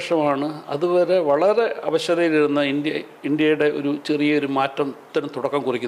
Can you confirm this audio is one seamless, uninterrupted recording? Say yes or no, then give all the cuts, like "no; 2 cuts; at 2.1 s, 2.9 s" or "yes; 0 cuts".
yes; 0 cuts